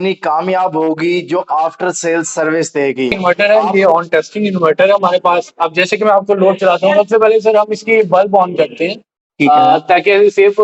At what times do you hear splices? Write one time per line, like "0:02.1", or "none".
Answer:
0:03.2